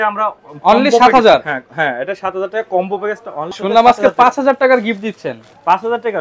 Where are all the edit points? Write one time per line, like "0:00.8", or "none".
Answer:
0:03.6